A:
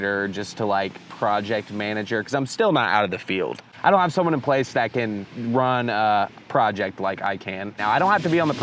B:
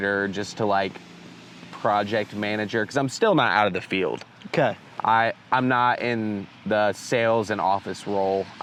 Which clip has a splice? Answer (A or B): A